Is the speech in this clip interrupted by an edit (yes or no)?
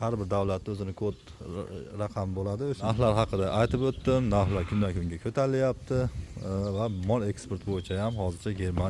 yes